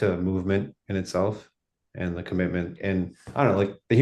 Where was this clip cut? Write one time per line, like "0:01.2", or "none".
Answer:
0:02.7